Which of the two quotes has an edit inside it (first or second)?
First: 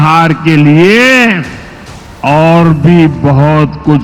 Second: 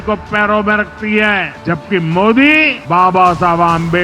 second